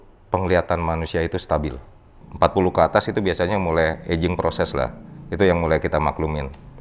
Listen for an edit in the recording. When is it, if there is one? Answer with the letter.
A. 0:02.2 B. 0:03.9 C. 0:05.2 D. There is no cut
A